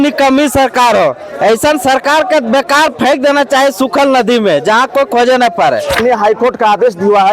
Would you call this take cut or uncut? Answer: cut